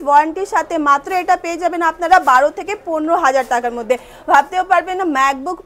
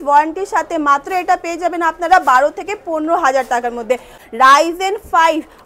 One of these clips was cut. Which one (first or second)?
second